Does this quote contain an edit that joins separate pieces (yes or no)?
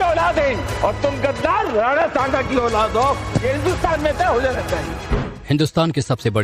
yes